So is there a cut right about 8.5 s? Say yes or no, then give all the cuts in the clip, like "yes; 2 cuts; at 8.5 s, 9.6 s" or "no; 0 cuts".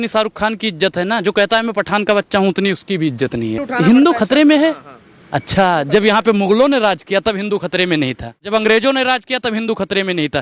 yes; 2 cuts; at 3.7 s, 8.5 s